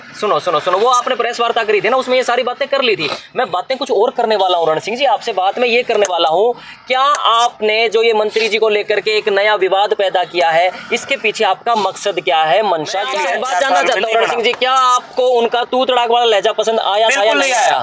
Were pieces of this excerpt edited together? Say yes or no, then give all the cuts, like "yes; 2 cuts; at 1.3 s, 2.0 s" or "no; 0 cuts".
yes; 1 cut; at 13.2 s